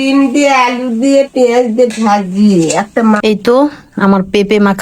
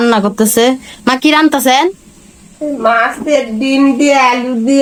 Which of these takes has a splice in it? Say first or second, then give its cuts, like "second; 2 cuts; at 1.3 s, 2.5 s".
first; 1 cut; at 3.2 s